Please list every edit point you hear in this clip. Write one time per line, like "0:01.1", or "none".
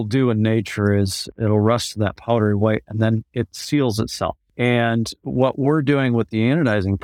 0:01.3
0:04.4